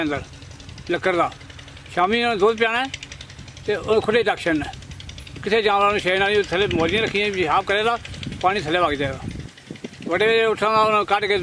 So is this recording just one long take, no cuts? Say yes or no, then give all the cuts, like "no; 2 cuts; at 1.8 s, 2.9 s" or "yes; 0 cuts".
yes; 0 cuts